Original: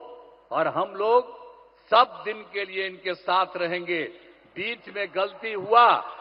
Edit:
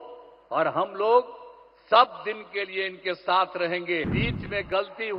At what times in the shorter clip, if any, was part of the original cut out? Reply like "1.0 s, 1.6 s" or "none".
4.1 s